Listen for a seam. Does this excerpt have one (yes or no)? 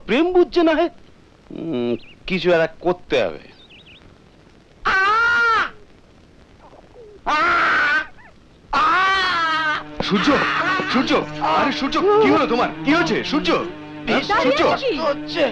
no